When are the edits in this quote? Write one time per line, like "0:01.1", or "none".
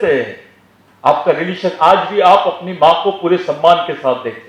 none